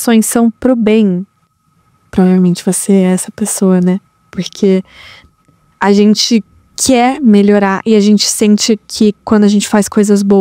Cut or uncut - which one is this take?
uncut